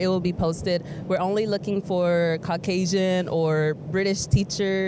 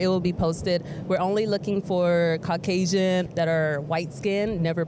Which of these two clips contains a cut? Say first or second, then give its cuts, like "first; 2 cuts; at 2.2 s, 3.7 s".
second; 1 cut; at 3.3 s